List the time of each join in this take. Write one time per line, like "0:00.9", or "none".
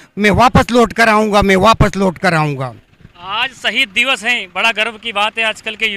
none